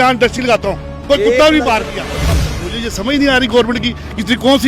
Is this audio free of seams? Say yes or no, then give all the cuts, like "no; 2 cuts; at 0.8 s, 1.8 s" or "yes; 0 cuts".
no; 1 cut; at 2.3 s